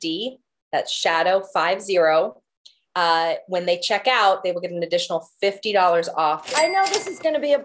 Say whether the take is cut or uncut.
cut